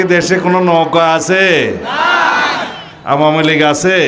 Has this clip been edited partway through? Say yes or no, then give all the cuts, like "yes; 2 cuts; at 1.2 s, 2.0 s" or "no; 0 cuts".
no; 0 cuts